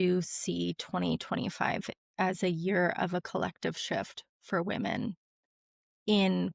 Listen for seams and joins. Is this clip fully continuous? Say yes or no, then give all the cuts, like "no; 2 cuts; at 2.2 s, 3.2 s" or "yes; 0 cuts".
yes; 0 cuts